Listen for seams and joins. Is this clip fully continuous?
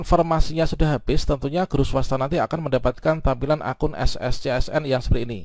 yes; 0 cuts

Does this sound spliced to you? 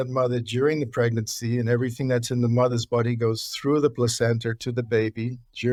no; 0 cuts

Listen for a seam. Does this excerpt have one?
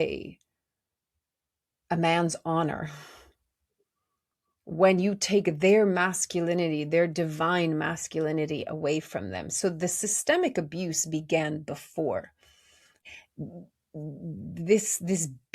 no; 0 cuts

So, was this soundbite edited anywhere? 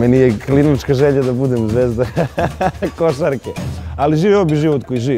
no; 0 cuts

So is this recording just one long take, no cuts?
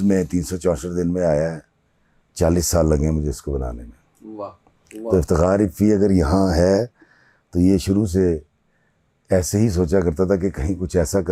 yes; 0 cuts

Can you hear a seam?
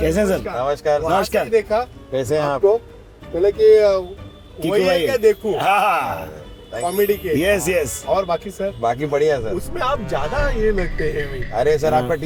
no; 0 cuts

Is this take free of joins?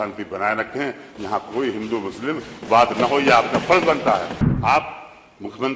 no; 1 cut; at 4.4 s

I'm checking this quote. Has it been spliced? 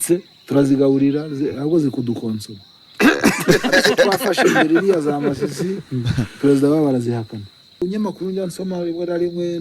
yes; 1 cut; at 7.8 s

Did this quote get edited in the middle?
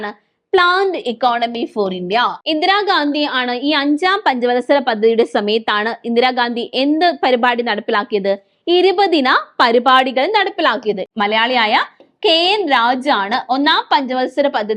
yes; 2 cuts; at 2.4 s, 11.0 s

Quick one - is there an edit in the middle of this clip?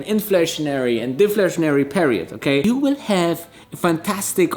yes; 1 cut; at 2.6 s

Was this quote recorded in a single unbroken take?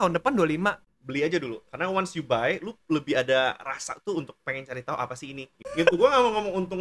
no; 2 cuts; at 0.9 s, 5.6 s

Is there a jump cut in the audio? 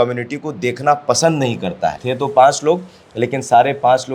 yes; 1 cut; at 2.0 s

